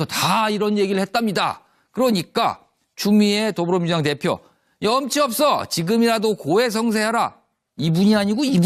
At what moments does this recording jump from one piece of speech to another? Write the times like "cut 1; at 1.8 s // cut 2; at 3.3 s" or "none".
none